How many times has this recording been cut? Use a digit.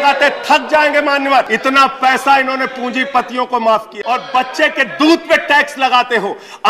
2